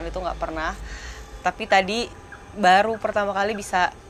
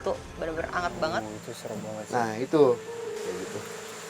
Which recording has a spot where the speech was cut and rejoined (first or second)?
second